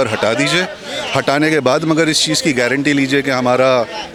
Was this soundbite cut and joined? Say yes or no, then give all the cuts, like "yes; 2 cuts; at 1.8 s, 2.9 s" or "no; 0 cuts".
no; 0 cuts